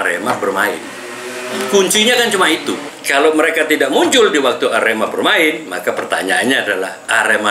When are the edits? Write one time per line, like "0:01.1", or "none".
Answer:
0:02.9